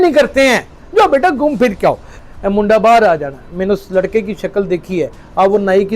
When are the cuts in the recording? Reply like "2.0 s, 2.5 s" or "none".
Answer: 2.1 s